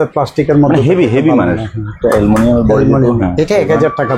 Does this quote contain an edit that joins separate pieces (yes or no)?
no